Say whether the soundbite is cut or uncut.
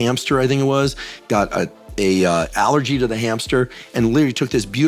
uncut